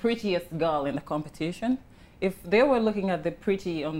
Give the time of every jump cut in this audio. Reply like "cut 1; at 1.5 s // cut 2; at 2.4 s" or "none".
none